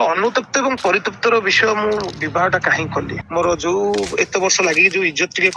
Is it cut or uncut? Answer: cut